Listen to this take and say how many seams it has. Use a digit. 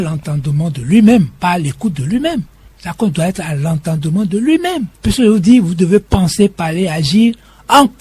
0